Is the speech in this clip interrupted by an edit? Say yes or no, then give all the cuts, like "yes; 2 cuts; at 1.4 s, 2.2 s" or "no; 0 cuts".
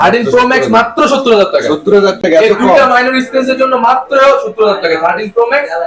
no; 0 cuts